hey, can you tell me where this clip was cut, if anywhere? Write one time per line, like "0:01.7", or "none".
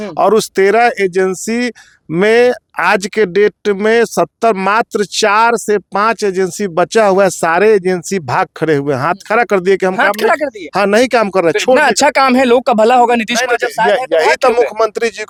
none